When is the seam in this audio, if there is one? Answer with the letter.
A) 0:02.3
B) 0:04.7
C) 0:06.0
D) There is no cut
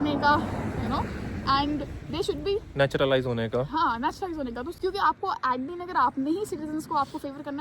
B